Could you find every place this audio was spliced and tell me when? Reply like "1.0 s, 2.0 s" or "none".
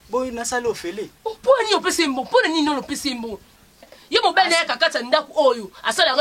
4.0 s